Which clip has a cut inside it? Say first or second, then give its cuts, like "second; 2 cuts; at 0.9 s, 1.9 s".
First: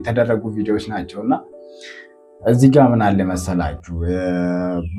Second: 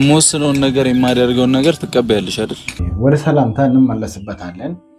second; 1 cut; at 2.7 s